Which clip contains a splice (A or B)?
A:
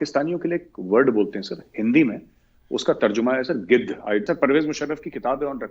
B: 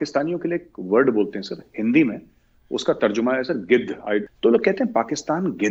A